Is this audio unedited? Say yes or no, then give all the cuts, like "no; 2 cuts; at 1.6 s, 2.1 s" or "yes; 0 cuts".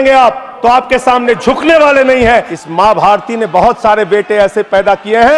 no; 1 cut; at 2.5 s